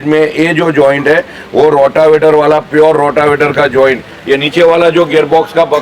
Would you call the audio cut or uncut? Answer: cut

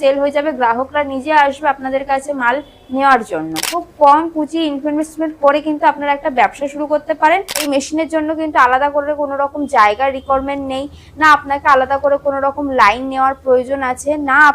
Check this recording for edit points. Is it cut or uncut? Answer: cut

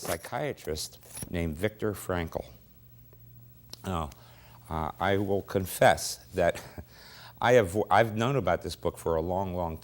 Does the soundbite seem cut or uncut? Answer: cut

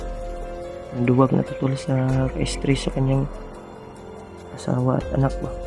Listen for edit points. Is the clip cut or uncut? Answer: cut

